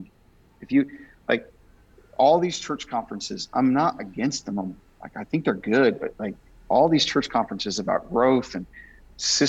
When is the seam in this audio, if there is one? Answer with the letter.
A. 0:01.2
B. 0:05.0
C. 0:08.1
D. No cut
D